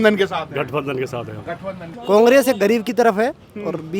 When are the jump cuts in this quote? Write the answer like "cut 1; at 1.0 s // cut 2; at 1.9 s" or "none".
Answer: cut 1; at 1.9 s